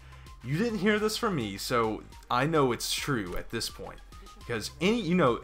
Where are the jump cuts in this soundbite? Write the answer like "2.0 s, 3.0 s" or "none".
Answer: 2.9 s